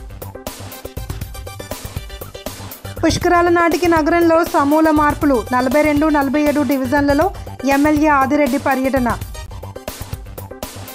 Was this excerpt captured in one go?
no; 2 cuts; at 1.0 s, 3.0 s

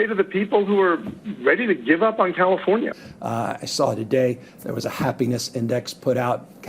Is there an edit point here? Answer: yes; 1 cut; at 3.0 s

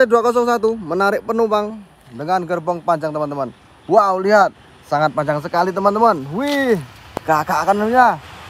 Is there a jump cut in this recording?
no; 0 cuts

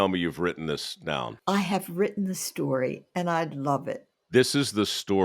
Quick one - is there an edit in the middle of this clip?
yes; 2 cuts; at 1.3 s, 4.1 s

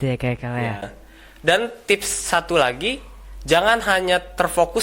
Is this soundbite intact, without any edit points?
no; 1 cut; at 1.0 s

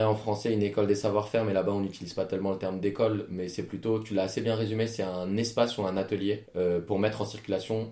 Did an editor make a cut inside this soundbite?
yes; 1 cut; at 6.5 s

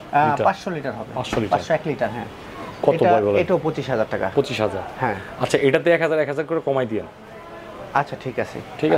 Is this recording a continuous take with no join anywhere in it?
yes; 0 cuts

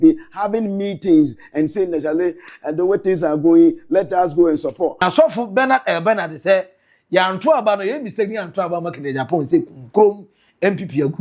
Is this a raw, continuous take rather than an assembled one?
no; 1 cut; at 5.0 s

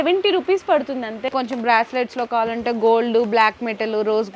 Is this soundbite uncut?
no; 1 cut; at 1.3 s

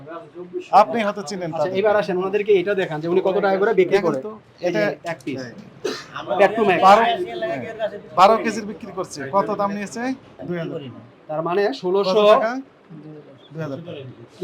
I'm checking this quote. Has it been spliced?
yes; 1 cut; at 10.4 s

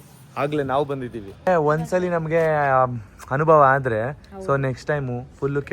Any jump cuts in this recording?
yes; 1 cut; at 1.5 s

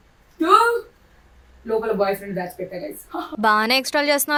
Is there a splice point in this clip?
no; 0 cuts

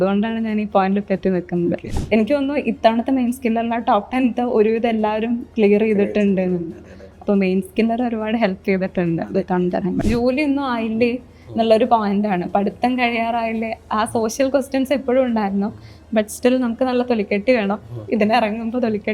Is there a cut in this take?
yes; 2 cuts; at 1.9 s, 10.0 s

